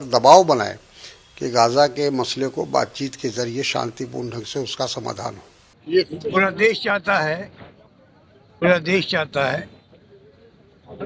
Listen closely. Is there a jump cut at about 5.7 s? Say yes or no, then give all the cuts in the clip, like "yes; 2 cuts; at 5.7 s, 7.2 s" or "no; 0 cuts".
yes; 1 cut; at 5.7 s